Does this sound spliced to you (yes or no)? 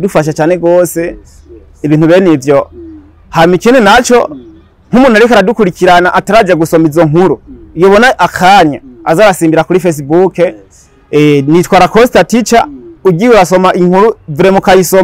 no